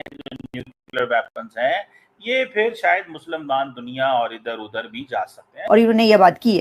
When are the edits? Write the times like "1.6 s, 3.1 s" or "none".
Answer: 5.5 s

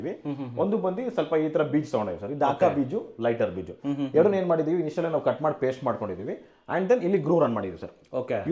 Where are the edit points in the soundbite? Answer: none

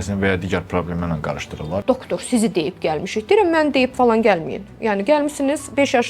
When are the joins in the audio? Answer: 1.8 s

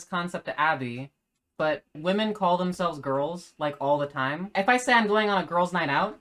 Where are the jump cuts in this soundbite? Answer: 4.4 s

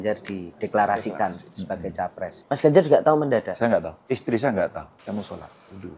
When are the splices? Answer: 2.4 s, 3.9 s, 4.9 s

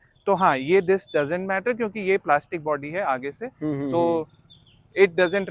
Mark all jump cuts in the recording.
none

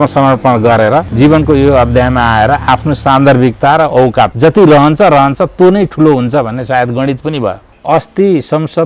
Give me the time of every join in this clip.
1.1 s, 4.3 s, 7.7 s

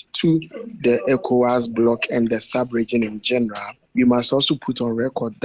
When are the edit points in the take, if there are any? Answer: none

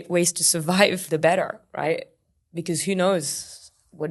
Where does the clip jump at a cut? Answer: 1.0 s, 2.2 s

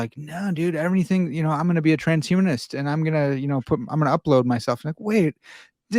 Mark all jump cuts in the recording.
none

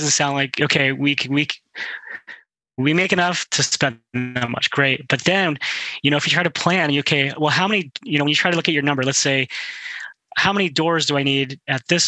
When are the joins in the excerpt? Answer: none

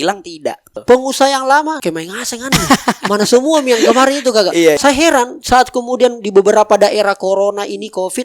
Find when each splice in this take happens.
0.8 s, 1.8 s, 4.8 s

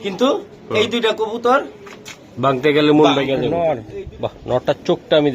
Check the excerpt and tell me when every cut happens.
3.5 s

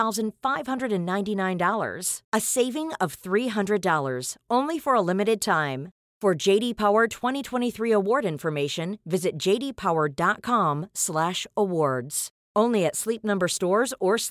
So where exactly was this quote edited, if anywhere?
none

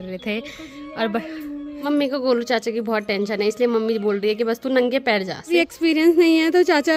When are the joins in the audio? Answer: 1.8 s, 5.5 s

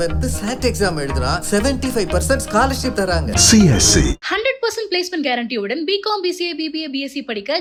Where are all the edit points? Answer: none

